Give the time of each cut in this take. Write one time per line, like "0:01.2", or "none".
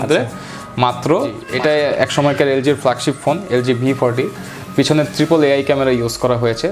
0:01.4

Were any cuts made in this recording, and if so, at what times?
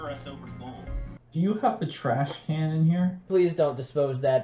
0:01.1
0:03.2

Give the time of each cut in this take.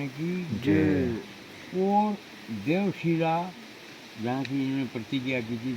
none

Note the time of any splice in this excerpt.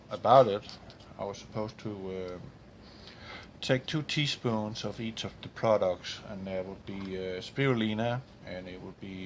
0:03.4

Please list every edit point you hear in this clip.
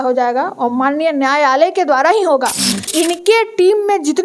0:02.8

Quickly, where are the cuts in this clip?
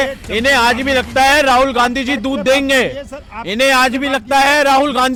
none

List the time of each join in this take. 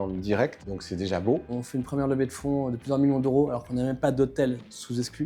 0:01.1

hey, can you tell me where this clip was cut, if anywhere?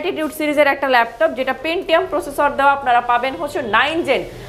none

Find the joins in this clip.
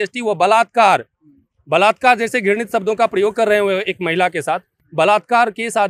none

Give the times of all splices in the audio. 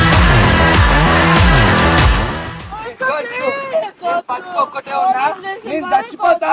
0:02.5

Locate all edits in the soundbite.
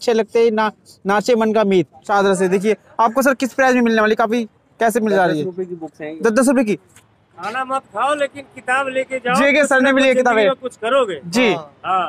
0:02.0
0:06.9

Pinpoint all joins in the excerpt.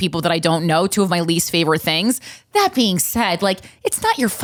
none

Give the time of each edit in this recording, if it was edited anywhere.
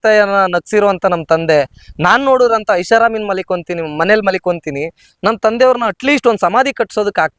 none

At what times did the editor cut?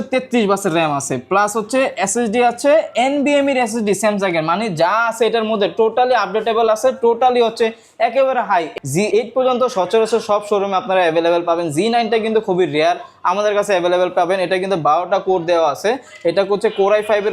0:08.7

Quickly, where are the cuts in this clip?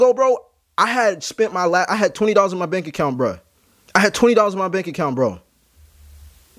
none

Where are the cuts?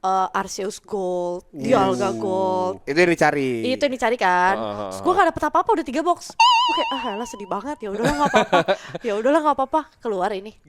none

